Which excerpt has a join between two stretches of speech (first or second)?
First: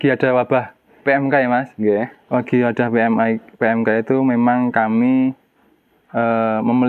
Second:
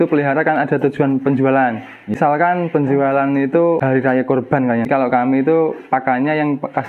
second